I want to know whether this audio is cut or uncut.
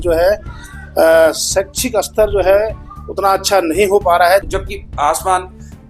cut